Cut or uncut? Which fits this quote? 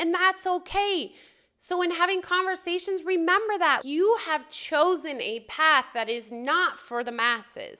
uncut